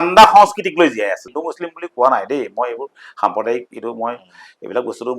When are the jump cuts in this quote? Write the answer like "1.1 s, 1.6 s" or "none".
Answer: 1.2 s